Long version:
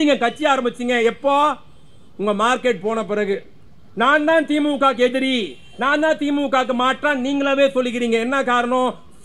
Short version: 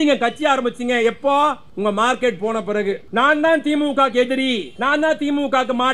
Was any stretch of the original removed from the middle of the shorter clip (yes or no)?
yes